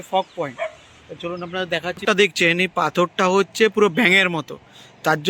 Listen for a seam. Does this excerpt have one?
yes; 1 cut; at 2.0 s

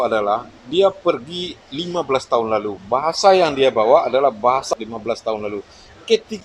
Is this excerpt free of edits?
no; 1 cut; at 4.7 s

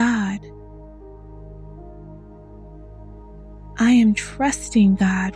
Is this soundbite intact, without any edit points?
no; 2 cuts; at 0.7 s, 3.7 s

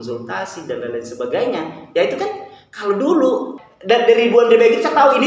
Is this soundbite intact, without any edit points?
no; 1 cut; at 3.6 s

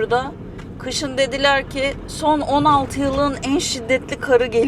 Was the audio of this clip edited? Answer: no; 0 cuts

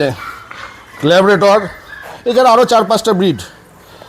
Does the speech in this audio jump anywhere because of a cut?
no; 0 cuts

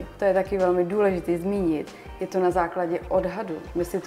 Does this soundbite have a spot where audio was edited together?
no; 0 cuts

